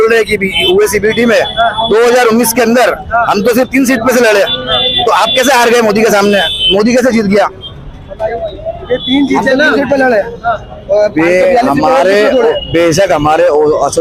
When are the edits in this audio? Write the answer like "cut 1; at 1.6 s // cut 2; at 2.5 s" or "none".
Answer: none